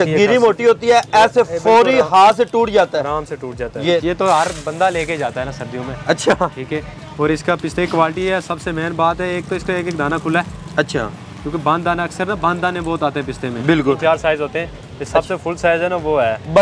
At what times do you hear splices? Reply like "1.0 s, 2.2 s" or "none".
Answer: 4.0 s, 14.0 s